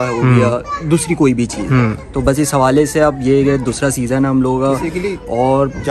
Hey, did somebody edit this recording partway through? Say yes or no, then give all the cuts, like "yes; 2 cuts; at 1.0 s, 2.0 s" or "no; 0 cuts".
no; 0 cuts